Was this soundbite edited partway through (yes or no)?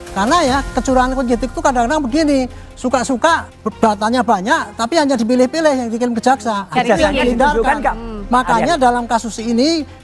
yes